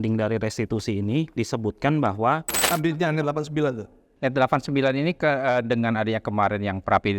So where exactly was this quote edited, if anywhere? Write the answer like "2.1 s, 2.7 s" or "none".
2.6 s